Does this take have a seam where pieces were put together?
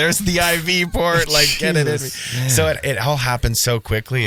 no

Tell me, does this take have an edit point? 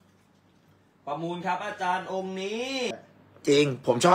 yes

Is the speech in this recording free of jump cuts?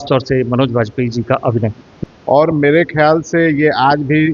no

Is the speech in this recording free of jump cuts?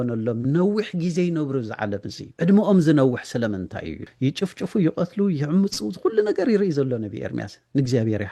no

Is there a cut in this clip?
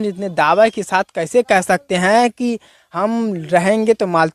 no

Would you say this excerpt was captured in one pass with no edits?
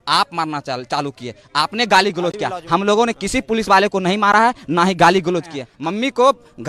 no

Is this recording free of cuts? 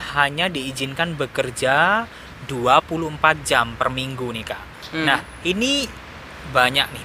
yes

